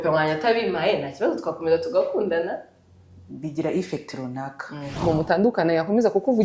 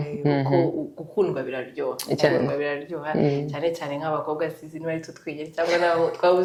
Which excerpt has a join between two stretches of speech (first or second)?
first